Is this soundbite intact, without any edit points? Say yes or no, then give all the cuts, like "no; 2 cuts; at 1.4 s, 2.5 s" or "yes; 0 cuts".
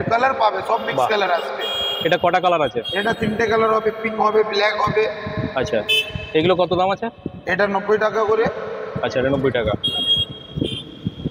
yes; 0 cuts